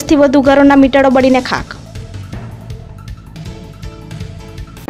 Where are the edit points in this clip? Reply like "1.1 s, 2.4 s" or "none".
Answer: none